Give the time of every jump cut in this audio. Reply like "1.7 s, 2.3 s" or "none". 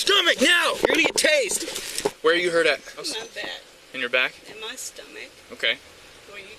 2.1 s, 3.1 s